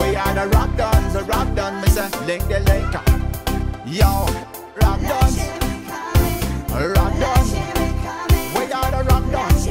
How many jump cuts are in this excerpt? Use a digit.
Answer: 1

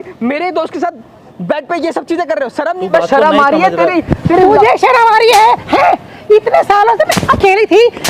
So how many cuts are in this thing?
1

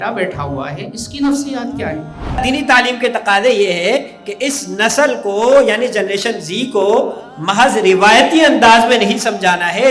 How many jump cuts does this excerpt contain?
1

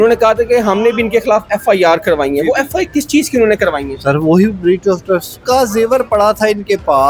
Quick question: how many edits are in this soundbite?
1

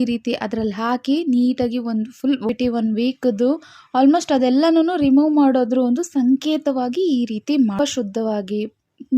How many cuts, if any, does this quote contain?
2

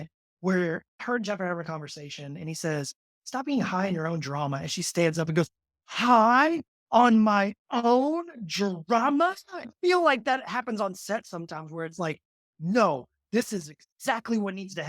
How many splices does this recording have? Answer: 2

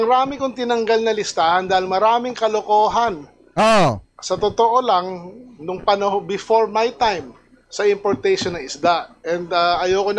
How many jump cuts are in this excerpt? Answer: 0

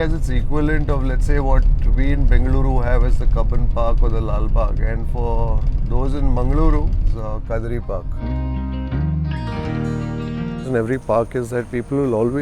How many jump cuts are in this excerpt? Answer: 3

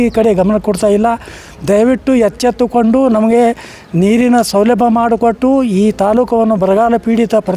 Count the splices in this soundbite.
0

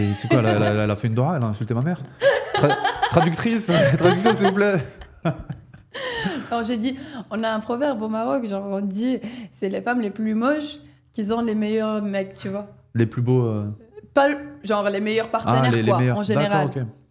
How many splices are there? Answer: 0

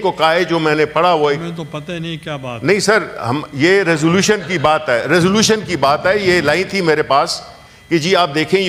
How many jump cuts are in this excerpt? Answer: 0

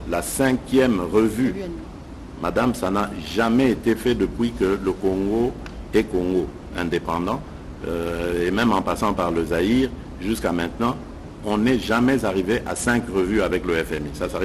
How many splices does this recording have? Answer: 0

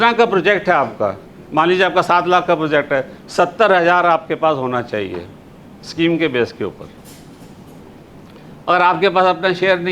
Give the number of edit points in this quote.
0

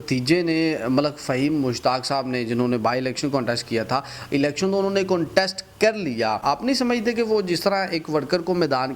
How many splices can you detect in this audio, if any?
1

